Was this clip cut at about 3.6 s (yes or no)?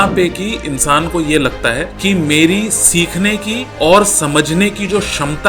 yes